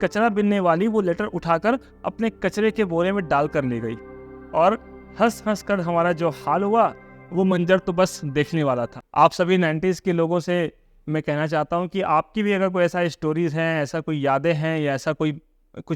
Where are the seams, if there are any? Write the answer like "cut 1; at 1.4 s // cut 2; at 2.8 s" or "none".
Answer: cut 1; at 9.0 s